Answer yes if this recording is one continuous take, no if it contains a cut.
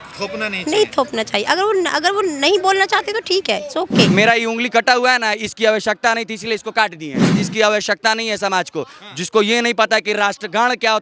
no